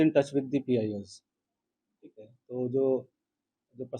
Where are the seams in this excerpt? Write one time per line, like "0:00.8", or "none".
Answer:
none